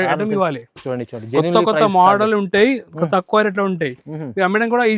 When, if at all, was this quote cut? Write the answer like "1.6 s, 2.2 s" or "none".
none